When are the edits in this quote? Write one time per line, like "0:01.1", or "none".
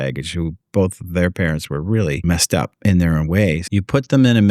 0:02.2
0:03.6